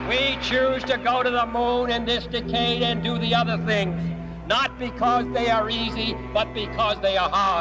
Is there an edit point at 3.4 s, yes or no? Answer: no